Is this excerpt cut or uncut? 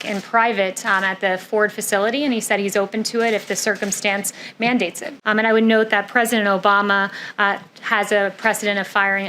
cut